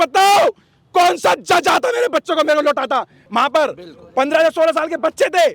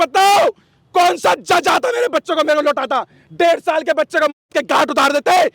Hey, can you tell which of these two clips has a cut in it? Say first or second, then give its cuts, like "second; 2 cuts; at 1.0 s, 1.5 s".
first; 1 cut; at 3.2 s